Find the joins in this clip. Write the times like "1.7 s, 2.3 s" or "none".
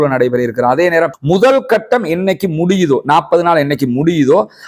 1.1 s